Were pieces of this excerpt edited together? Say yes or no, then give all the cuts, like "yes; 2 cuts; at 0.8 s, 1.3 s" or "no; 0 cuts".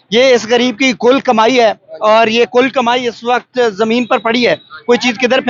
no; 0 cuts